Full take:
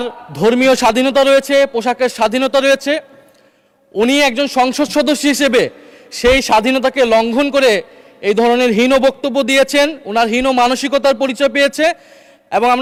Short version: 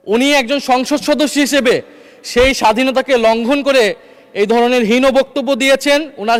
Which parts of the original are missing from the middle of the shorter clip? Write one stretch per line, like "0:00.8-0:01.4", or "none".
none